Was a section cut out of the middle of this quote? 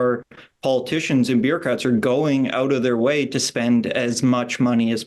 no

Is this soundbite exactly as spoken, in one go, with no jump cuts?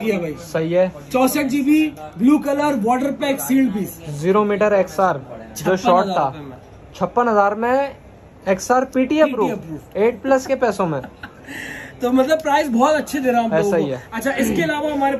yes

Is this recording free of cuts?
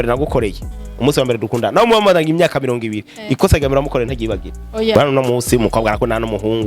no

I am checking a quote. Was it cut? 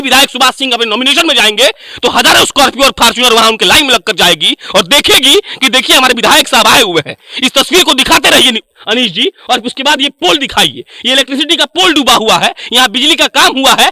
no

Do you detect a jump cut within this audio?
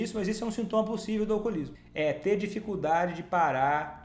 yes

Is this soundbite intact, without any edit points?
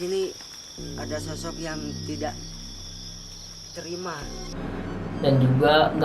no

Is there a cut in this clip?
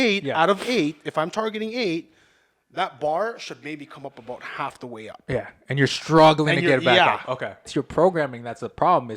yes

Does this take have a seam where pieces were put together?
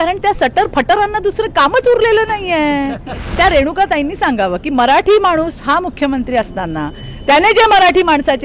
yes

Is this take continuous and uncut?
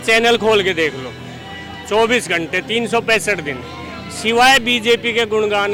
yes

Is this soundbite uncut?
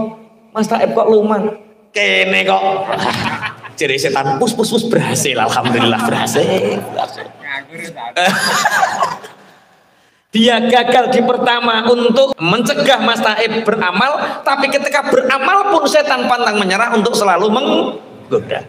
no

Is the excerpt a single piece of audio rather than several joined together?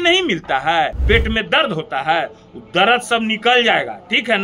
no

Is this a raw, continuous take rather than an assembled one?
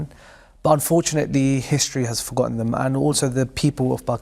yes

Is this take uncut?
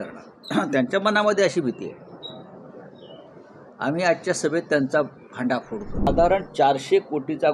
no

